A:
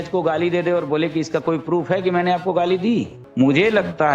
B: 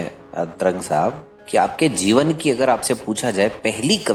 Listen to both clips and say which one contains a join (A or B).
A